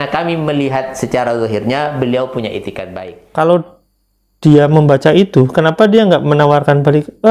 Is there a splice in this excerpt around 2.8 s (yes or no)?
yes